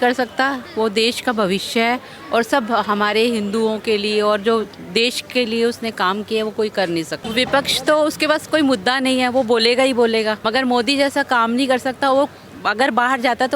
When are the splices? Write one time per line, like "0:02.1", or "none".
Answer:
0:07.2
0:10.4